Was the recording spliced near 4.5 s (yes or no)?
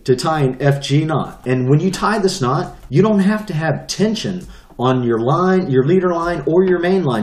no